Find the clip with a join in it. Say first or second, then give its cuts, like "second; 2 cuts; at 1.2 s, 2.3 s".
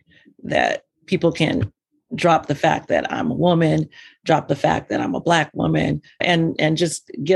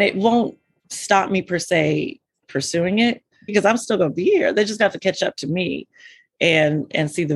second; 1 cut; at 3.5 s